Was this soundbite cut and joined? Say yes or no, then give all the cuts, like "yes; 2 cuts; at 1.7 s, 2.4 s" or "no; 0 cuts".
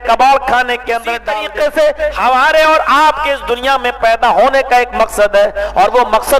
yes; 1 cut; at 1.1 s